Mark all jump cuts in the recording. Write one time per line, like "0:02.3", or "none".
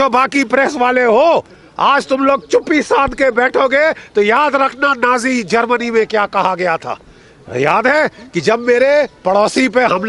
none